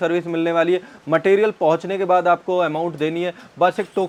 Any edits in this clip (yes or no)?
no